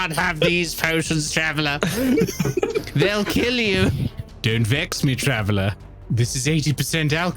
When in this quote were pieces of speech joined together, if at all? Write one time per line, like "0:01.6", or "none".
0:02.8
0:04.1
0:05.9